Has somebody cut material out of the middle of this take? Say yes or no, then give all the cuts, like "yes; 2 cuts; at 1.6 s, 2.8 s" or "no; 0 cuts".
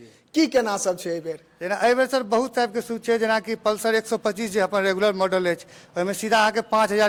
no; 0 cuts